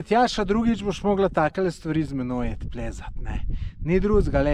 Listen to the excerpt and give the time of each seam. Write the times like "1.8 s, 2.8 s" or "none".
none